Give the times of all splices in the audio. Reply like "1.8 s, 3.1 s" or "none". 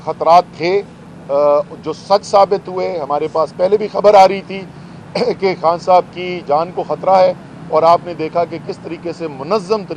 none